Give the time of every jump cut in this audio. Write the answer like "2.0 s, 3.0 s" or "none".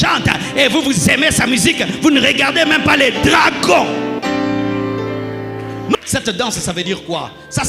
6.0 s